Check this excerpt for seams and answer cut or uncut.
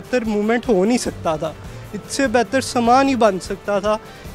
uncut